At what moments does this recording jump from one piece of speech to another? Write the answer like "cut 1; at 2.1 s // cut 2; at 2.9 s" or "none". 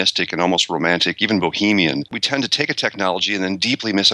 cut 1; at 2.2 s